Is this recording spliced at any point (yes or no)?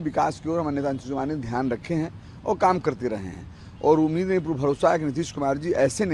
no